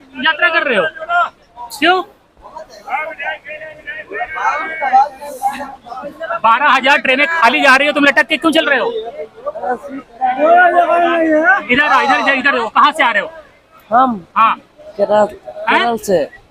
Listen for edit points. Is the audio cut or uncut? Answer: uncut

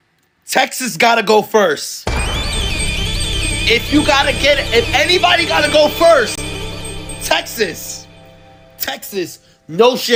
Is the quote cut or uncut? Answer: uncut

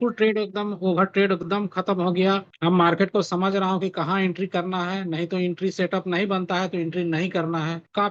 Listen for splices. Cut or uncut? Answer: uncut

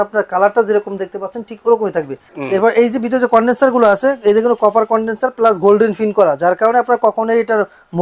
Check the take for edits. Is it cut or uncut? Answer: cut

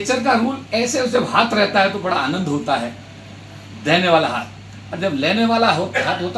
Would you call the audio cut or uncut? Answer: uncut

